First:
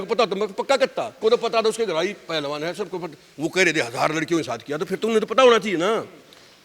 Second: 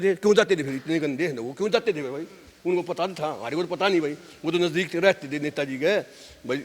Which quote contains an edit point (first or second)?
first